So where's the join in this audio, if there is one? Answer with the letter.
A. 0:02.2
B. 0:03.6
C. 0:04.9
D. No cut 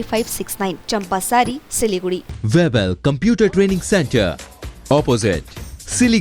A